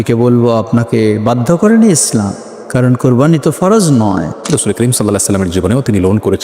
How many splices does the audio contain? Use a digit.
1